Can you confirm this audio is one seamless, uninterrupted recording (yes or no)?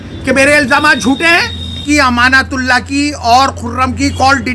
no